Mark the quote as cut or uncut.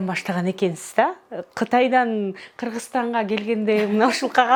uncut